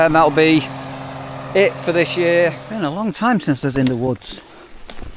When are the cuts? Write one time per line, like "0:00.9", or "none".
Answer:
0:02.6